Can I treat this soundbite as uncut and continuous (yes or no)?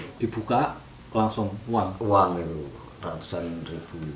yes